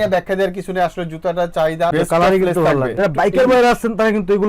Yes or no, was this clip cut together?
yes